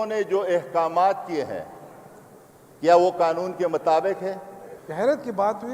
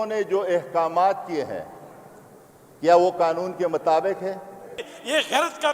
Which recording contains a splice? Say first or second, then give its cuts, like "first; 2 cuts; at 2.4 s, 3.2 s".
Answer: second; 1 cut; at 4.8 s